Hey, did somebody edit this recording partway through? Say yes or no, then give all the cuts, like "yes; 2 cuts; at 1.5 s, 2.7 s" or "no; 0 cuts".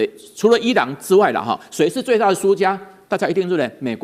no; 0 cuts